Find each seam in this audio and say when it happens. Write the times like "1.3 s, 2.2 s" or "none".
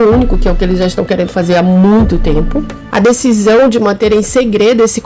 2.7 s